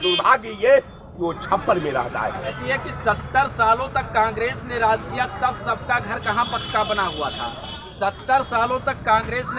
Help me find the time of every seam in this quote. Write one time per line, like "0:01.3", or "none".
0:02.6